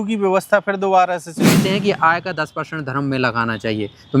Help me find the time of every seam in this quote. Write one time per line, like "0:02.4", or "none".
0:01.6